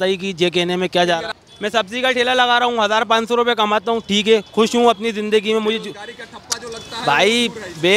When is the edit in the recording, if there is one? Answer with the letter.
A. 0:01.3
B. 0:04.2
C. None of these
A